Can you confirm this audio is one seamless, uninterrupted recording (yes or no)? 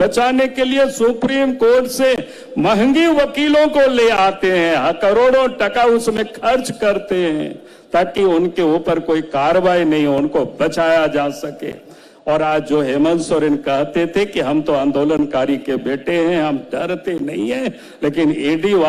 yes